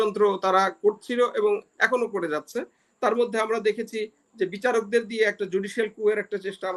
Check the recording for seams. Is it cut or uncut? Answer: uncut